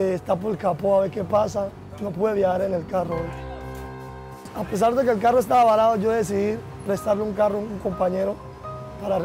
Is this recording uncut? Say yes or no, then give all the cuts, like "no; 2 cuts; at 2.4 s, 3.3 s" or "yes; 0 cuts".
no; 1 cut; at 3.9 s